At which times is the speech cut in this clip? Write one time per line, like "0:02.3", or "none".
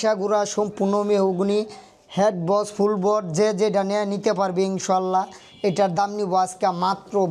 none